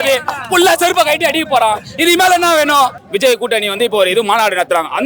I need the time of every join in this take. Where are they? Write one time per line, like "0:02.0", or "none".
0:03.0